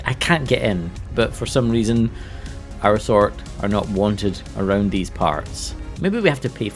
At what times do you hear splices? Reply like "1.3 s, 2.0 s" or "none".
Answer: 1.1 s, 5.9 s

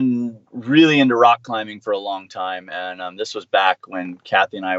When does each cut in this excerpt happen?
none

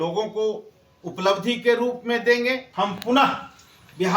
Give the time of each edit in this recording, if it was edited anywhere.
2.7 s

